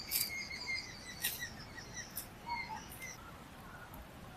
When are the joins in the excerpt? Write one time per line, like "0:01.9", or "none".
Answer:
0:03.2